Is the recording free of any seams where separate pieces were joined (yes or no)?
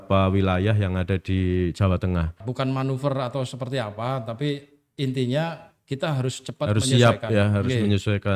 no